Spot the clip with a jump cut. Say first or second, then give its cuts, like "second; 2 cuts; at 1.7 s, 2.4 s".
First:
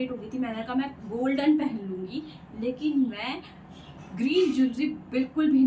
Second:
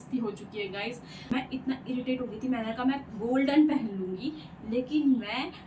second; 1 cut; at 1.1 s